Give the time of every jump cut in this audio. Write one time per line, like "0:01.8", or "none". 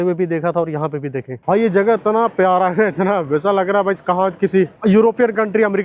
0:01.3
0:04.7